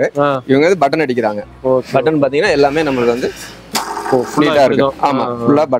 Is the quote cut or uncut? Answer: uncut